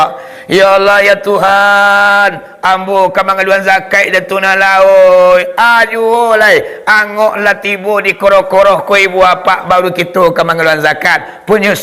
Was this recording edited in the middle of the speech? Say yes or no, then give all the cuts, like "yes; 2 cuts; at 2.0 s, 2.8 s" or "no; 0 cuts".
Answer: no; 0 cuts